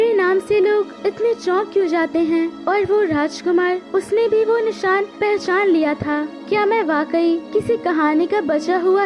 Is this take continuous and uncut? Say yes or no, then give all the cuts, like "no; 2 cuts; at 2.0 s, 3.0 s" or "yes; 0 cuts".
no; 6 cuts; at 0.9 s, 2.6 s, 3.8 s, 5.1 s, 6.3 s, 7.4 s